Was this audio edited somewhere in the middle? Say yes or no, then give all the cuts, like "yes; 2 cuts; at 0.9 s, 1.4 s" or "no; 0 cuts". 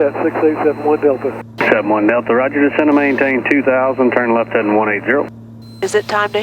no; 0 cuts